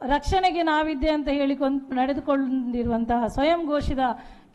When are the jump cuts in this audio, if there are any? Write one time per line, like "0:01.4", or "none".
0:01.9